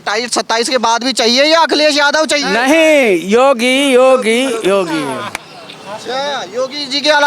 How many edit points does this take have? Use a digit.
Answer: 0